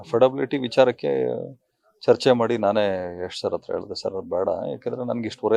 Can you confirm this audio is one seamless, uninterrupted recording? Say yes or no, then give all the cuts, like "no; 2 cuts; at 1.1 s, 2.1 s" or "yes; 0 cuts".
yes; 0 cuts